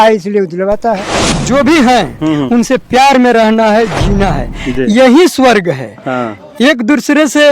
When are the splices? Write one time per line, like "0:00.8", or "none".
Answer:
0:01.3